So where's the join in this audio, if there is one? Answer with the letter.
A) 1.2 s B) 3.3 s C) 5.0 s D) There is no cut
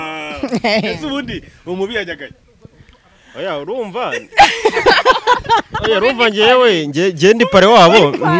D